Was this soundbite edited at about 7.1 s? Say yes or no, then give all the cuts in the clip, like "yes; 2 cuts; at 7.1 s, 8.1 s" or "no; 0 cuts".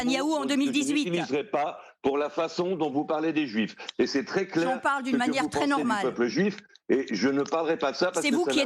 no; 0 cuts